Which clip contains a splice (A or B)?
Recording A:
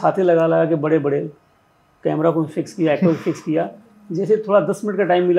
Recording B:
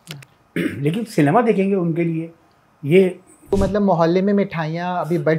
B